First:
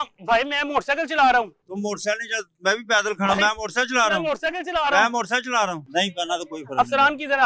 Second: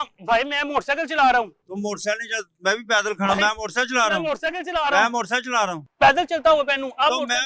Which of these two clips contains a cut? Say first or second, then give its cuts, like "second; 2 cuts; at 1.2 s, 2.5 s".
first; 1 cut; at 5.9 s